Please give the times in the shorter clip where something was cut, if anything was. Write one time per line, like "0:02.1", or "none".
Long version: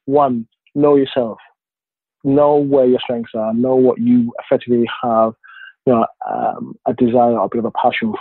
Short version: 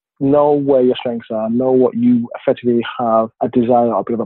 0:03.3